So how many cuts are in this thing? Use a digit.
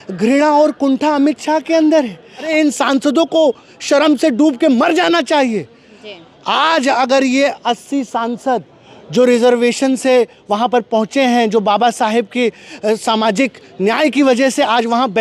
1